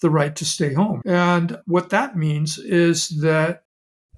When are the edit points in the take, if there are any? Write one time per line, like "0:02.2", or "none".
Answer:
0:01.0